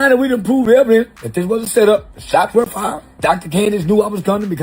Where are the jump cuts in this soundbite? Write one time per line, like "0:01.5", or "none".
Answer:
0:01.2
0:02.2
0:03.1